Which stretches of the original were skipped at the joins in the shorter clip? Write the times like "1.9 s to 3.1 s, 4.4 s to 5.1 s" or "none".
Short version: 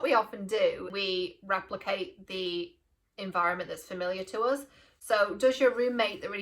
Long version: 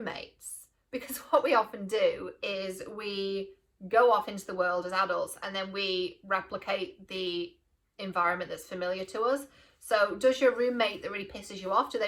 2.3 s to 5.7 s